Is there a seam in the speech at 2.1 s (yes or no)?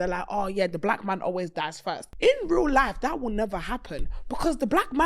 yes